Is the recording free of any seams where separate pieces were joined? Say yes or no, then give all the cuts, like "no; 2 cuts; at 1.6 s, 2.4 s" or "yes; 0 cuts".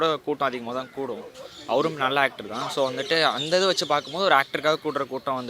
yes; 0 cuts